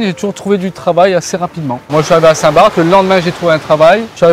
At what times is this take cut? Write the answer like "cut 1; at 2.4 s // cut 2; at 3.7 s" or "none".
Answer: cut 1; at 1.9 s

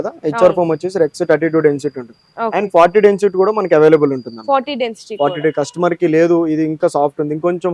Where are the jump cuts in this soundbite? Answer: none

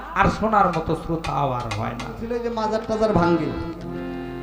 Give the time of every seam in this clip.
cut 1; at 2.5 s

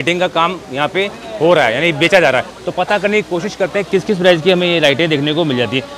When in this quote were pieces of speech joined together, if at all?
none

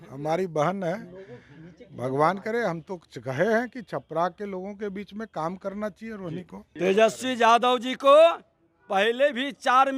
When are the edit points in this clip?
cut 1; at 6.6 s

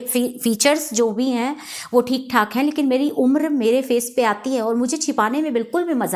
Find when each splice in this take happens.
none

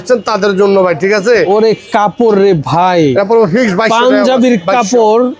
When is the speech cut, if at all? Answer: none

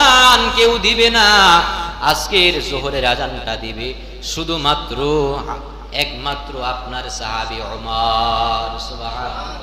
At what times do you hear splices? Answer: none

